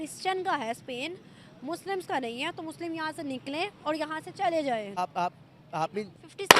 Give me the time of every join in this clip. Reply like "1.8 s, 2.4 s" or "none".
4.9 s